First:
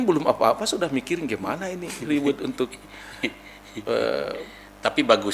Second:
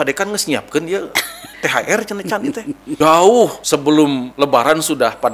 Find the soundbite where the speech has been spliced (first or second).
second